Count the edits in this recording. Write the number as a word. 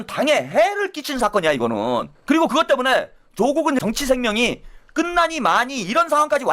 two